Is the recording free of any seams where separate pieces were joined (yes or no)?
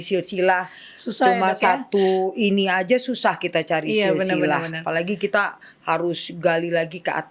yes